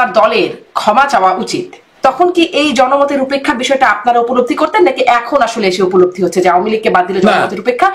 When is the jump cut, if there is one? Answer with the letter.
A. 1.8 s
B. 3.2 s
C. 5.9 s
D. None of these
A